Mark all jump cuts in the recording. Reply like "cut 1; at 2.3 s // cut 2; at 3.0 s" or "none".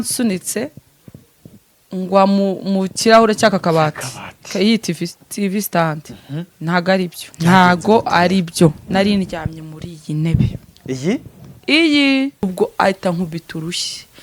cut 1; at 7.2 s // cut 2; at 12.4 s